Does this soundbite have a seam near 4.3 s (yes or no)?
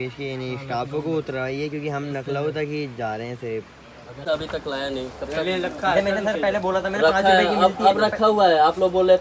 yes